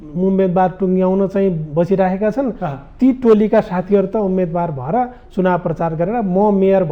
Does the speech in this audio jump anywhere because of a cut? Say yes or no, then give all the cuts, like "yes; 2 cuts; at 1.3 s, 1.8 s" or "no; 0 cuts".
no; 0 cuts